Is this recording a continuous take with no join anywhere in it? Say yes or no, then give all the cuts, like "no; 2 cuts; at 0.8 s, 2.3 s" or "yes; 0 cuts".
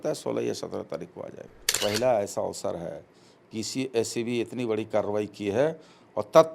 no; 1 cut; at 1.7 s